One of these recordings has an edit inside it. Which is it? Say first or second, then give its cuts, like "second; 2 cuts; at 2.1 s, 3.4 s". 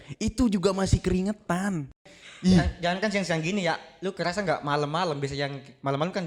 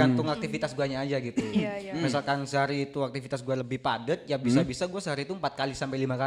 first; 1 cut; at 2.0 s